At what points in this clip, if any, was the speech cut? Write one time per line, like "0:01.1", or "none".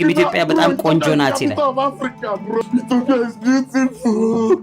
0:02.6